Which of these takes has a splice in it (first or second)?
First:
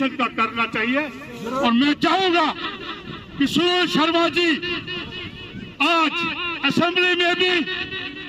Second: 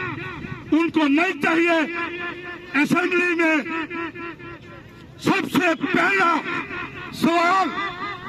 first